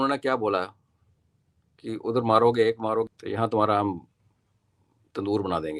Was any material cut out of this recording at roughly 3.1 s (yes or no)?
yes